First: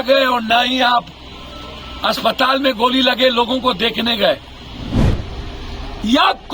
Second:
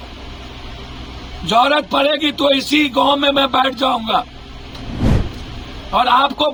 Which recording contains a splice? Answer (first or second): first